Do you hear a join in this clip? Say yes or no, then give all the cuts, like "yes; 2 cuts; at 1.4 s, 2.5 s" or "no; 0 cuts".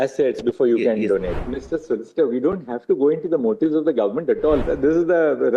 yes; 2 cuts; at 1.3 s, 4.6 s